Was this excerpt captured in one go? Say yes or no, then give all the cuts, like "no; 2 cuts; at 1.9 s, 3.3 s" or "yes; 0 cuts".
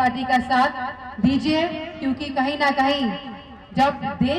yes; 0 cuts